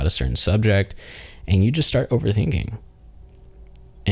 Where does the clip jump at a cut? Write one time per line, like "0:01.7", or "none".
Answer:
none